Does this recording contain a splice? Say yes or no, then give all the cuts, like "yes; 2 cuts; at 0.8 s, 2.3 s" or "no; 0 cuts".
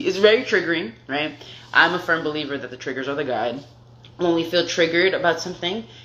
no; 0 cuts